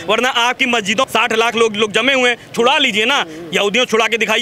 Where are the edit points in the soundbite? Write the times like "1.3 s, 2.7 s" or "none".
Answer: 1.1 s